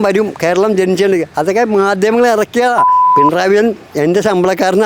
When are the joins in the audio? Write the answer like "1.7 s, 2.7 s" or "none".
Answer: 3.0 s